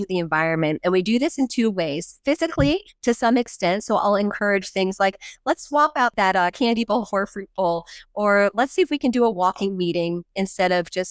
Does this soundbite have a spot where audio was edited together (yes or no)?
yes